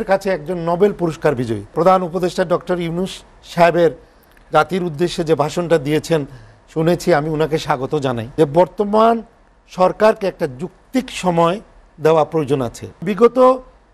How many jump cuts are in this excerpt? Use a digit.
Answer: 3